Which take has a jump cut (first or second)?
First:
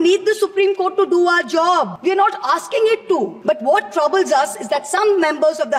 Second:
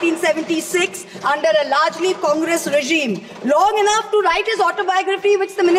first